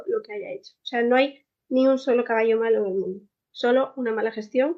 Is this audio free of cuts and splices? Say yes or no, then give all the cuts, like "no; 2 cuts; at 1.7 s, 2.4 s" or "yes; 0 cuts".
yes; 0 cuts